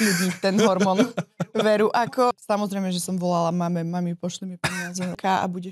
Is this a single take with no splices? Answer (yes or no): yes